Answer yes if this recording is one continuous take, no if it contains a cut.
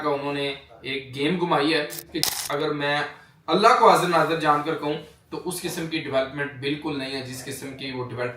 no